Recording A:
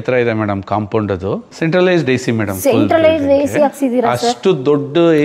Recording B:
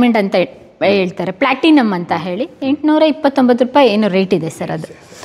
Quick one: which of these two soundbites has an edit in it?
A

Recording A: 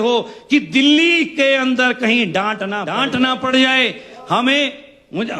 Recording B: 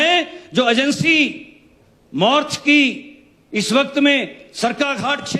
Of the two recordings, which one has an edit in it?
A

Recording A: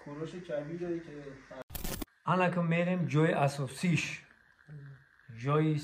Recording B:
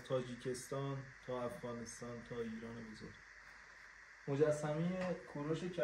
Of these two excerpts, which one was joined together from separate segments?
A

